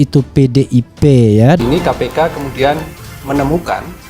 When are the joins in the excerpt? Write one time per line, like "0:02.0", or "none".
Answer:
0:01.6

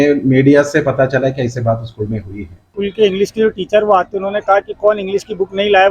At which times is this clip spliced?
0:02.7

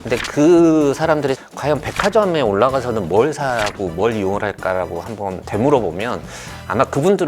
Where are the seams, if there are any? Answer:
0:01.4
0:05.4

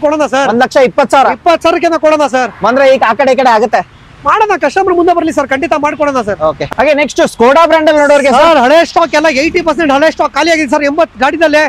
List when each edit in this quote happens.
none

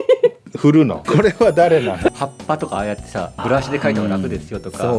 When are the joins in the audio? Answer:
0:01.0
0:02.1
0:03.4

